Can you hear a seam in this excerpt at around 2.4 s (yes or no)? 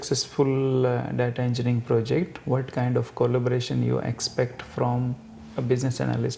no